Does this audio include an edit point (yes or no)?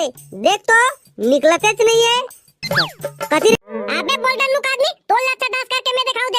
yes